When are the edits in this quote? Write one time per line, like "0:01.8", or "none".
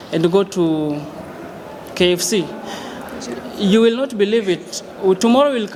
none